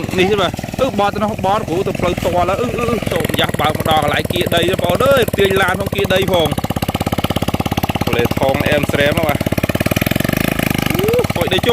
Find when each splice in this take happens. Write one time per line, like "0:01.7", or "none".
0:03.1